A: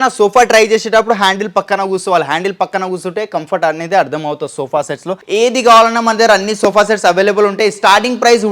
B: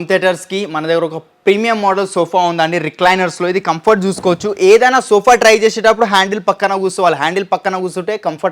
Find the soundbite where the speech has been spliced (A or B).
A